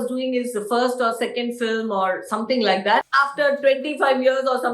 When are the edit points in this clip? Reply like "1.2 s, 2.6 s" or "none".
3.0 s